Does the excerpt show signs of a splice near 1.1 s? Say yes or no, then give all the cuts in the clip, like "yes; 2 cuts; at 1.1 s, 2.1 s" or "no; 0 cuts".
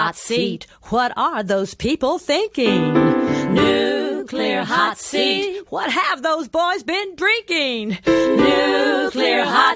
no; 0 cuts